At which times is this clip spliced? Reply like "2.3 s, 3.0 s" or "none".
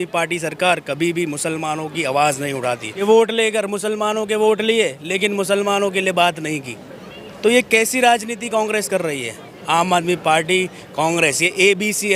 3.0 s